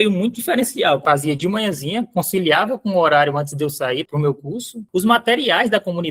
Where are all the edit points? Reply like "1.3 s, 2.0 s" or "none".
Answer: 1.0 s, 4.8 s